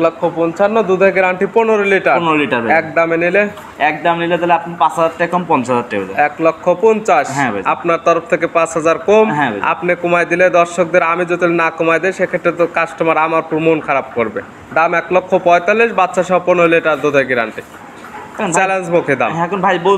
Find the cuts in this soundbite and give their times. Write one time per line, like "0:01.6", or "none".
none